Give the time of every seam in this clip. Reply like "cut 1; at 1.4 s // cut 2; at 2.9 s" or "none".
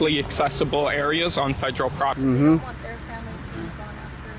cut 1; at 2.2 s